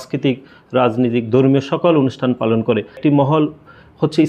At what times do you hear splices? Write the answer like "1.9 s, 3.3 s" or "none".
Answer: 3.0 s